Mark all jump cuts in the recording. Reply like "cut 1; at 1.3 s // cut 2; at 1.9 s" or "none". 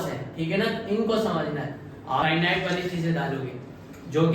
cut 1; at 2.2 s